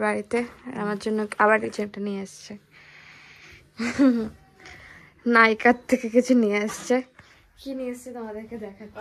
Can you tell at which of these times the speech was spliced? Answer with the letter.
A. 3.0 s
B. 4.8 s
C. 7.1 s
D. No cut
D